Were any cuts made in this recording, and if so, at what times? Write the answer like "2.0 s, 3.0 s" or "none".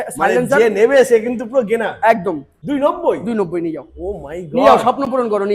2.5 s